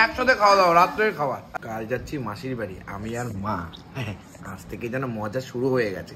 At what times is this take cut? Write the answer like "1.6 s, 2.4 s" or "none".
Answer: 1.5 s